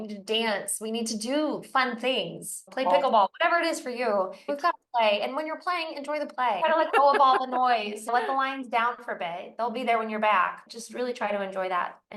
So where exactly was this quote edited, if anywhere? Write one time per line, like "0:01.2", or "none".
0:02.7
0:04.5
0:06.6
0:08.1
0:10.6